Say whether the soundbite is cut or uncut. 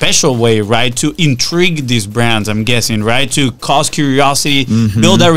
uncut